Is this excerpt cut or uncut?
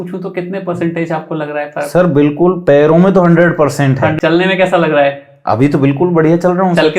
cut